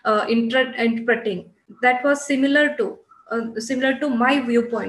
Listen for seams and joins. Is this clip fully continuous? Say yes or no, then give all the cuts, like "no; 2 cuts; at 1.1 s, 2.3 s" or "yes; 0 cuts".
yes; 0 cuts